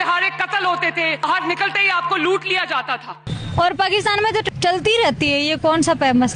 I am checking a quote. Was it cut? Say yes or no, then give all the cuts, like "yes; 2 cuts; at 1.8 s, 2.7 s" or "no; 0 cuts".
yes; 3 cuts; at 1.2 s, 3.2 s, 4.4 s